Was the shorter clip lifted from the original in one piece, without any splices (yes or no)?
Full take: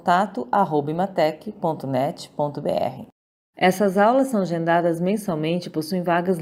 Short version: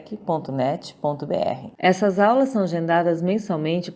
no